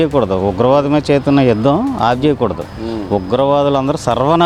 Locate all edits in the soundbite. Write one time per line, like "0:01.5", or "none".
none